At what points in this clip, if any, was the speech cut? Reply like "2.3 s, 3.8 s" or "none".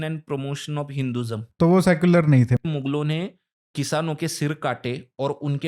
1.5 s, 2.6 s